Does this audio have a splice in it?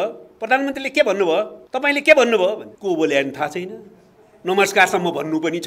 yes; 2 cuts; at 1.6 s, 2.7 s

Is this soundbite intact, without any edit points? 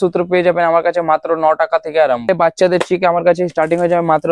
no; 1 cut; at 2.3 s

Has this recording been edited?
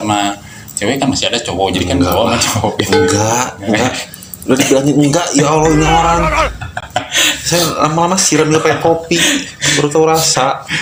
no; 0 cuts

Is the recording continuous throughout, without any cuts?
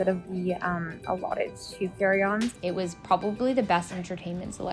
no; 1 cut; at 2.6 s

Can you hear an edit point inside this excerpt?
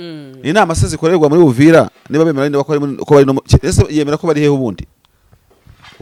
no; 0 cuts

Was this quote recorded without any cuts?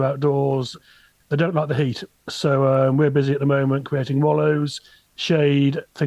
yes; 0 cuts

